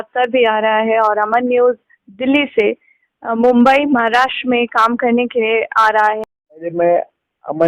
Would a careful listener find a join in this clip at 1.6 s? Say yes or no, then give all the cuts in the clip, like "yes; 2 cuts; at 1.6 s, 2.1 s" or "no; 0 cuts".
no; 1 cut; at 6.2 s